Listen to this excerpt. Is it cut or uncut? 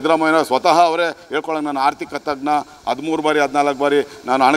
uncut